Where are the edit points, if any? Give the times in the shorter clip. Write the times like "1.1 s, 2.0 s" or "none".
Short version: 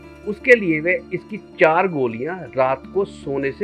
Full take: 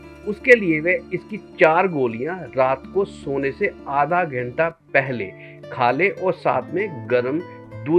none